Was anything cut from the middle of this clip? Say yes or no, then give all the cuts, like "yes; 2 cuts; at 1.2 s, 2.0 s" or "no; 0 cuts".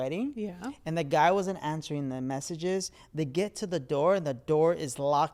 no; 0 cuts